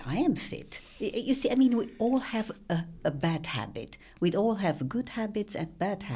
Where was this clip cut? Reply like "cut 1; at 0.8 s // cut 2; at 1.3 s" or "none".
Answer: none

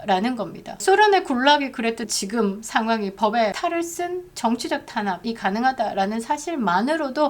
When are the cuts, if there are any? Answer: cut 1; at 0.8 s // cut 2; at 2.0 s // cut 3; at 3.6 s // cut 4; at 5.2 s

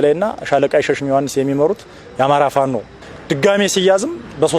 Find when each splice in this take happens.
cut 1; at 3.0 s

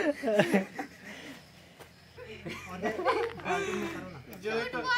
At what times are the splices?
cut 1; at 2.0 s

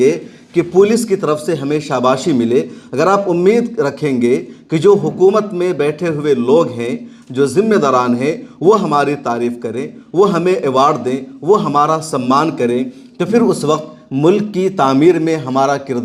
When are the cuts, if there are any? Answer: none

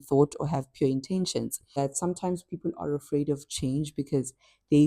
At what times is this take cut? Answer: cut 1; at 1.7 s

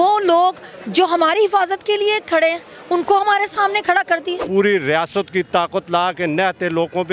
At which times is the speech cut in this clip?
cut 1; at 4.4 s

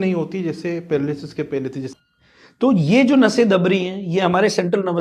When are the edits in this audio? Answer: cut 1; at 1.9 s

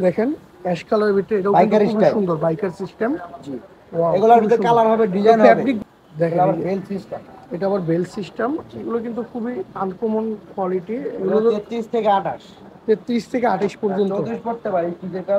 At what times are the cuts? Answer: cut 1; at 5.8 s

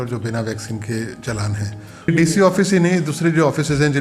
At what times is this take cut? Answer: cut 1; at 2.1 s

